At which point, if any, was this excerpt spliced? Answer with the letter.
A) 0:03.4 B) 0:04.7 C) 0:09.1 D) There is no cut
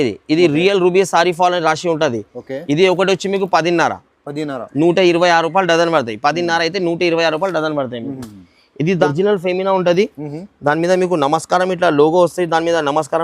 C